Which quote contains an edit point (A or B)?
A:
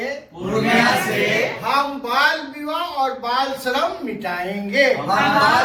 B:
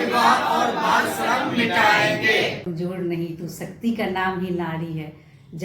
B